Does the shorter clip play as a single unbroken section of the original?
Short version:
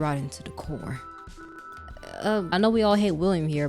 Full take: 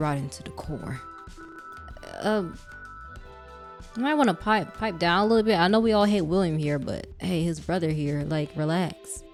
no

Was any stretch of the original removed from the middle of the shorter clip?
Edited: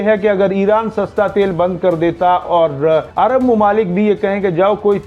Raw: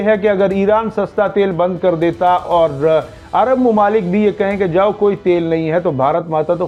yes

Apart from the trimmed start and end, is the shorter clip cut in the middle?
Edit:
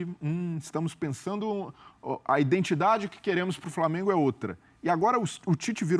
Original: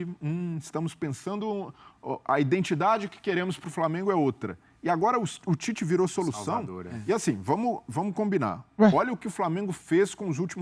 no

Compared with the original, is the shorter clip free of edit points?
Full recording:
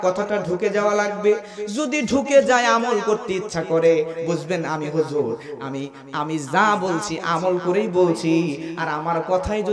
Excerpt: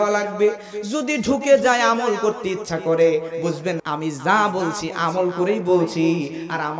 no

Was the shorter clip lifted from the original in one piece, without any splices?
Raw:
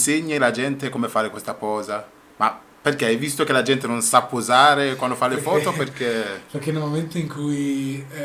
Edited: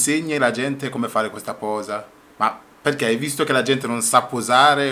yes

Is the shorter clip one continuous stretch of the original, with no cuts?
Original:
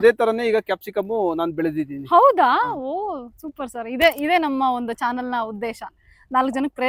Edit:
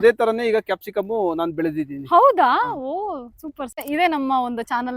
no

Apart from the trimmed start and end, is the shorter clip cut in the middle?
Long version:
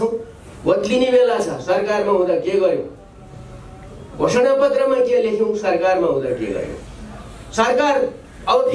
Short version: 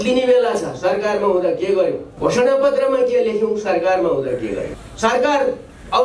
yes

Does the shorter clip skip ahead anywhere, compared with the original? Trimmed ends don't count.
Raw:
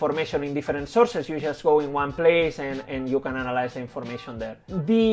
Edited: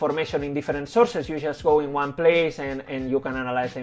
no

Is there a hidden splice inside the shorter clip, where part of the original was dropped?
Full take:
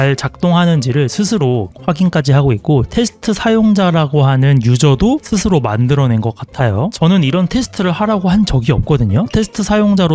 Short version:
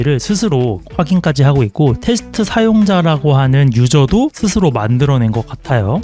no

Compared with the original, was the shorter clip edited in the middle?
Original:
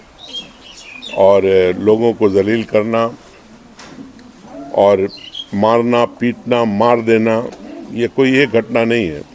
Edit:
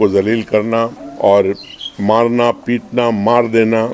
yes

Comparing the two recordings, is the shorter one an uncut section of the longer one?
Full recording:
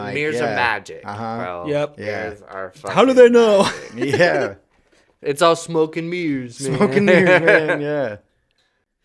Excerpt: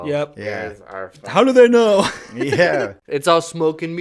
no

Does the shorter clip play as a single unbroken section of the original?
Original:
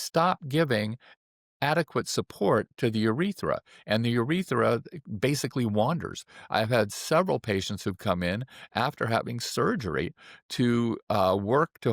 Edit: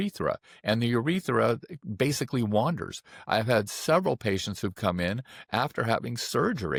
yes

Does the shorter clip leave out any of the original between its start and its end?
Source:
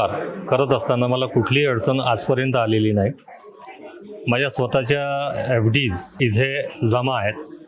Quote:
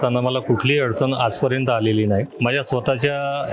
yes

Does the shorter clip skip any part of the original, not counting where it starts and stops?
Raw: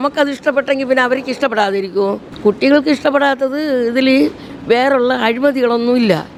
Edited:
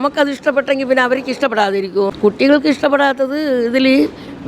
yes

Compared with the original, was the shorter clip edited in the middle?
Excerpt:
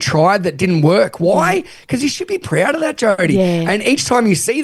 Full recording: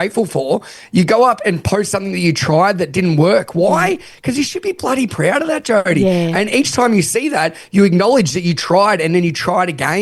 yes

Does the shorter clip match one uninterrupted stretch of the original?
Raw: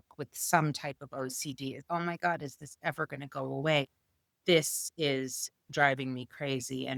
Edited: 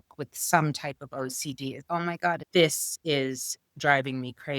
no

